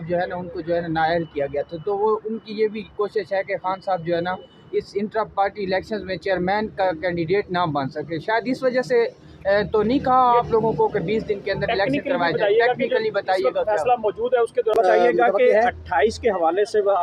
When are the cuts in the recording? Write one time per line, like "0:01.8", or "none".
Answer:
0:14.7